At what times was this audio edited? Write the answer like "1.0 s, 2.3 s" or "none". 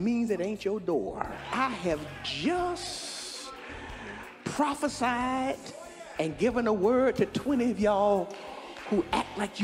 1.4 s